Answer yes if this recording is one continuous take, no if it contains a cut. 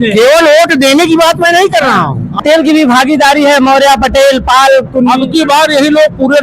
no